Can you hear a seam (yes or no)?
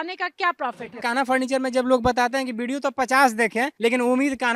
yes